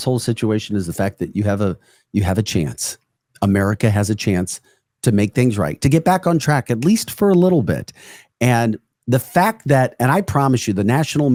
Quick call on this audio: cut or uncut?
uncut